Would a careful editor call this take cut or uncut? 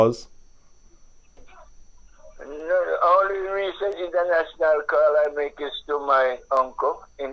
uncut